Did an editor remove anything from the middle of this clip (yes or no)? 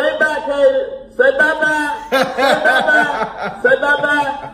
no